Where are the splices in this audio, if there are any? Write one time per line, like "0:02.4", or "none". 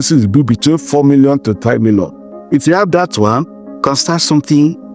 none